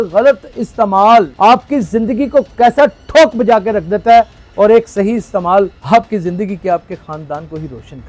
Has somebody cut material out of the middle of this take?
yes; 2 cuts; at 1.3 s, 5.8 s

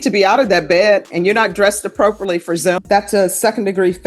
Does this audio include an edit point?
yes; 1 cut; at 2.8 s

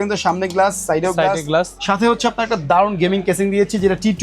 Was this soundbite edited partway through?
yes; 1 cut; at 1.8 s

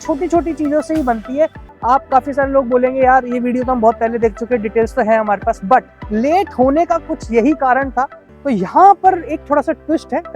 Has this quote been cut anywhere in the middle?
yes; 2 cuts; at 1.6 s, 8.3 s

